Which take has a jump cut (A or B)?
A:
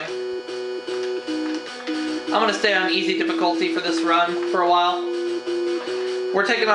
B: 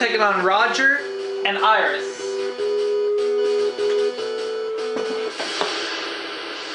A